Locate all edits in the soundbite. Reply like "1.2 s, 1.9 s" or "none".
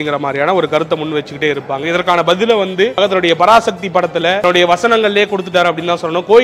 3.0 s, 4.4 s